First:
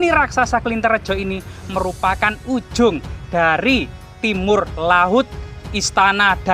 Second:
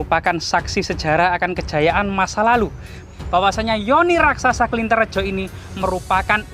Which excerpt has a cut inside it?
second; 1 cut; at 3.0 s

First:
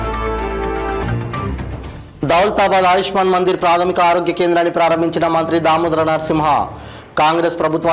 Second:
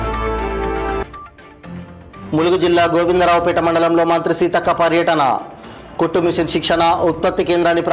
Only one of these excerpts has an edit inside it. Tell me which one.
first; 1 cut; at 0.9 s

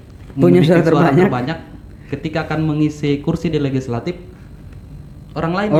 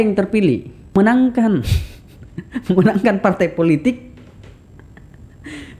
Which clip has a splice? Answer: second; 1 cut; at 1.0 s

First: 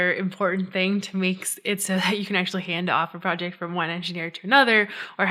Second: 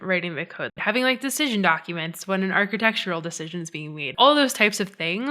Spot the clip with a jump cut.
second; 2 cuts; at 0.8 s, 4.1 s

